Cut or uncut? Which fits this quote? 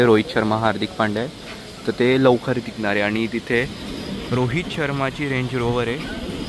uncut